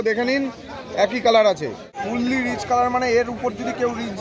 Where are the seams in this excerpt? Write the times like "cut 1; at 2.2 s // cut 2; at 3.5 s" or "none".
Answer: cut 1; at 2.0 s